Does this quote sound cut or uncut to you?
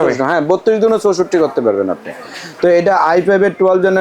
uncut